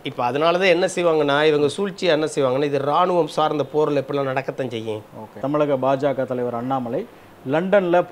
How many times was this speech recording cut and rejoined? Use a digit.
1